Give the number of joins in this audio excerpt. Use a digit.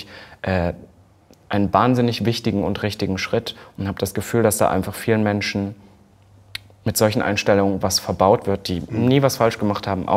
0